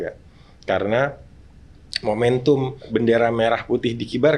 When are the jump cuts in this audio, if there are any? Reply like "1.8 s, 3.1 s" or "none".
2.9 s

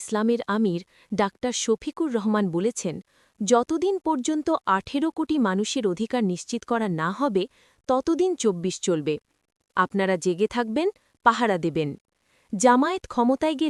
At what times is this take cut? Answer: none

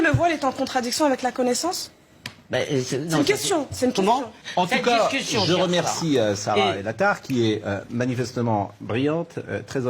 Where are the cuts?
4.4 s

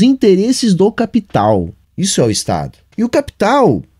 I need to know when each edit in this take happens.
1.8 s, 2.8 s

